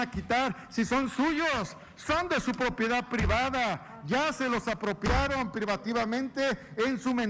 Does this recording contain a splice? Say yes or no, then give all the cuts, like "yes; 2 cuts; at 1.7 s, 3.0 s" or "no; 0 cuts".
no; 0 cuts